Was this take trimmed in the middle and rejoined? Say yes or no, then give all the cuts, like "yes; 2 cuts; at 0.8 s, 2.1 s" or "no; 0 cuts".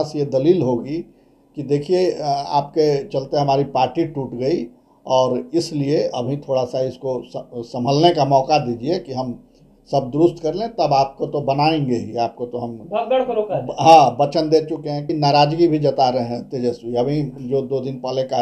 yes; 1 cut; at 15.1 s